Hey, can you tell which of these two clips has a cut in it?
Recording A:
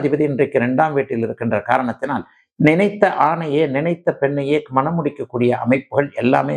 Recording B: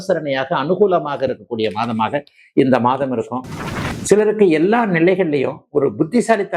B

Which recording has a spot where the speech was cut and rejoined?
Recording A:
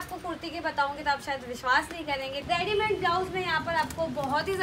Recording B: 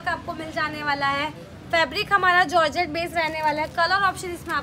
A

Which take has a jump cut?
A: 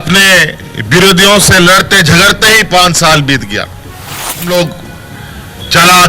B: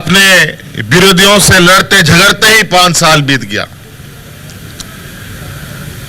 A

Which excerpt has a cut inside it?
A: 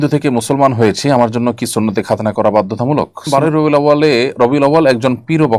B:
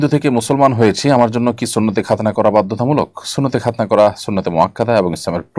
A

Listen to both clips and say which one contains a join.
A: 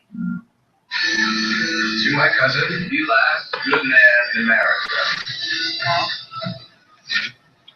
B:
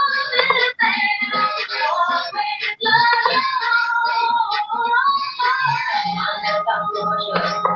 A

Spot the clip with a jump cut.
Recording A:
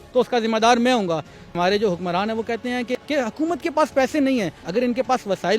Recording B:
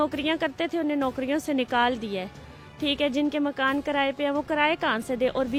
A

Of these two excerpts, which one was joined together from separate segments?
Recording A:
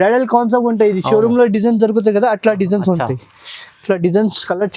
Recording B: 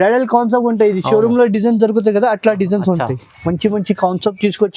B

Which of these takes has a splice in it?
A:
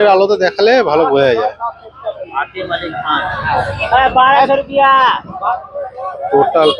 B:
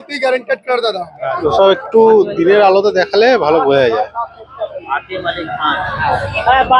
B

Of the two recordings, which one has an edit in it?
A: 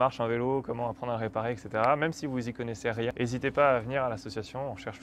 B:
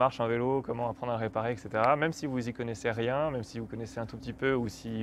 A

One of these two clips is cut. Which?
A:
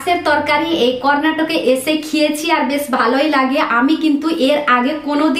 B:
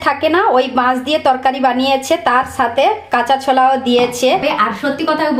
B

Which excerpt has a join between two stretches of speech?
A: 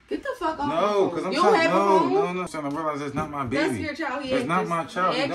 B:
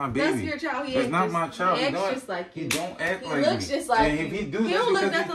A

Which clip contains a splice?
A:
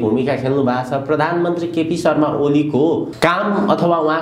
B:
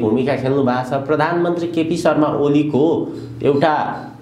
A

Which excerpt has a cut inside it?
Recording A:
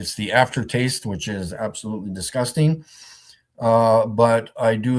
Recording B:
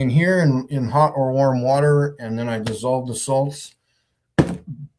A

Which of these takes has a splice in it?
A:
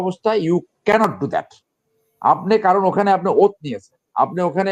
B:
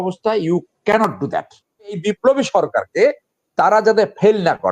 B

